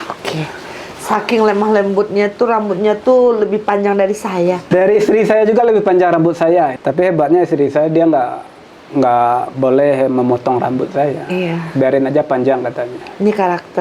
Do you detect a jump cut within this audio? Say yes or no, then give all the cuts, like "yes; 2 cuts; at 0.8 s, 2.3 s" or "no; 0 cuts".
yes; 2 cuts; at 4.6 s, 6.8 s